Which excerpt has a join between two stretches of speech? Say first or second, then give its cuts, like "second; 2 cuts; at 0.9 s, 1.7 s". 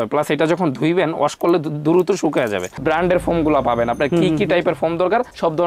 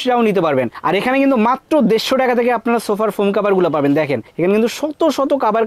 first; 1 cut; at 2.7 s